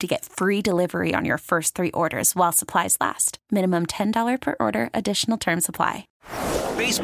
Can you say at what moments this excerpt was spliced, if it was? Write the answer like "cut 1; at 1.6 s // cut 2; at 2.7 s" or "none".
cut 1; at 6.0 s